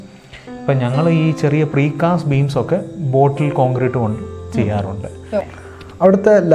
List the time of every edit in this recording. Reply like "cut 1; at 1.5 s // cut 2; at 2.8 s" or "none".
cut 1; at 5.5 s